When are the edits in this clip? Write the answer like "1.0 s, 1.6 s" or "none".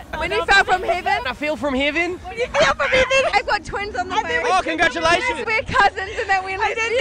none